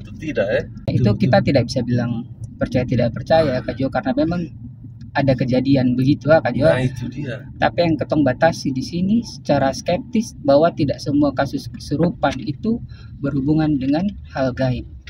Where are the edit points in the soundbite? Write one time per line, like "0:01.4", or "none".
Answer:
0:00.9